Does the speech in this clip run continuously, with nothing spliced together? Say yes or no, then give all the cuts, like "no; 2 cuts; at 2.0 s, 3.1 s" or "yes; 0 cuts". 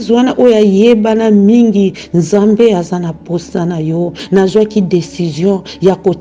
no; 1 cut; at 4.2 s